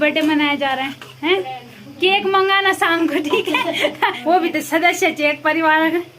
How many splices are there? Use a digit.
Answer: 1